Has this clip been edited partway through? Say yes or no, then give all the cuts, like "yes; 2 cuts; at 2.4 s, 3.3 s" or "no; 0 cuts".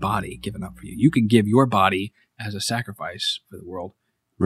no; 0 cuts